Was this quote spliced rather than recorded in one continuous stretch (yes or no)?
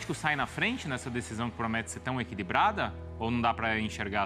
no